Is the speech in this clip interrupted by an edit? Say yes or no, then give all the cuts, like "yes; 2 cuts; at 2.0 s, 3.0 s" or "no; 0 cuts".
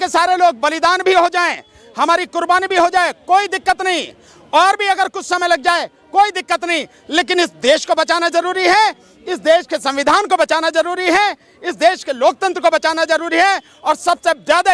no; 0 cuts